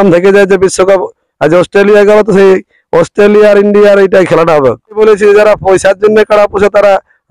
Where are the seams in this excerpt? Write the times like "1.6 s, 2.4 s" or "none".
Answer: 5.0 s